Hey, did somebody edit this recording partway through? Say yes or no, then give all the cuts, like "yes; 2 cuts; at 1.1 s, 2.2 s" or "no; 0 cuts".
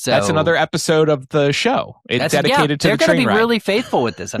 no; 0 cuts